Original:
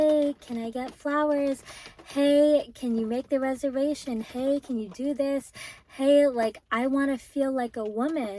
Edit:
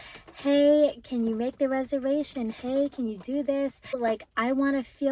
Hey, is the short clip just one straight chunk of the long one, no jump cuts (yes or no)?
no